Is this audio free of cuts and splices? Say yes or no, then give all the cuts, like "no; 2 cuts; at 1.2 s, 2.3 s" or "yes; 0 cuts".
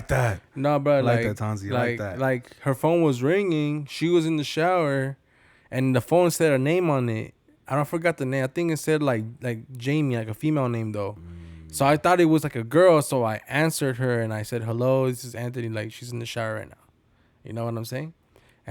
yes; 0 cuts